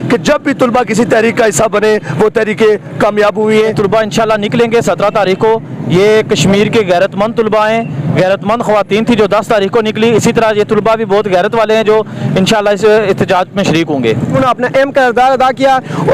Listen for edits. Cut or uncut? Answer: cut